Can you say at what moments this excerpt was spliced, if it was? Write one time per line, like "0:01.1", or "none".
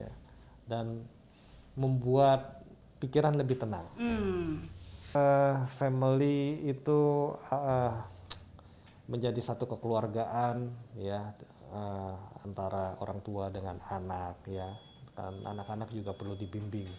0:05.2